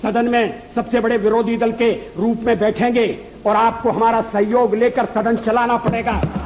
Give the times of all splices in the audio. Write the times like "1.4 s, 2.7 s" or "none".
none